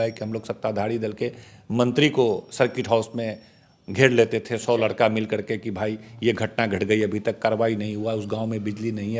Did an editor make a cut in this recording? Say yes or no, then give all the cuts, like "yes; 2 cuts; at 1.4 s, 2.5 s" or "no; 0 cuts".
no; 0 cuts